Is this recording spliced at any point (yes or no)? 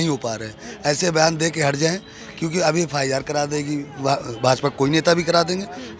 no